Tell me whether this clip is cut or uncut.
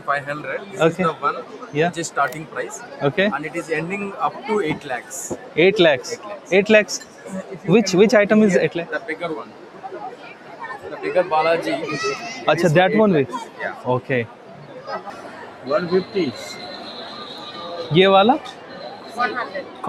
cut